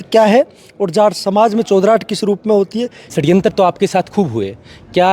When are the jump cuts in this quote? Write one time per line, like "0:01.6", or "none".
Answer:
0:03.1